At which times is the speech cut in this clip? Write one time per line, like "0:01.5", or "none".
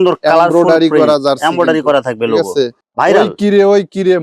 0:02.8